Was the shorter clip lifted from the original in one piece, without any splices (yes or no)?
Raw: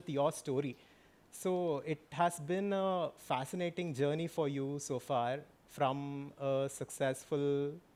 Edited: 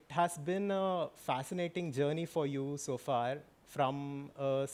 yes